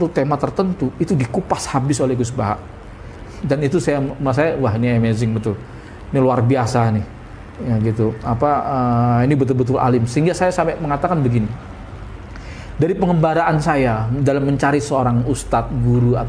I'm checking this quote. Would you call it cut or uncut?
uncut